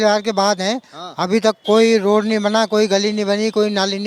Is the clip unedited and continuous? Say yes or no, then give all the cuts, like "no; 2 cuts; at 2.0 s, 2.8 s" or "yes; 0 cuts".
yes; 0 cuts